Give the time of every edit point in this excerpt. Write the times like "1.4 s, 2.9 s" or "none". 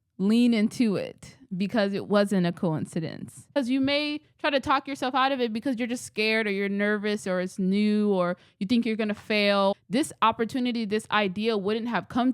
3.5 s, 9.7 s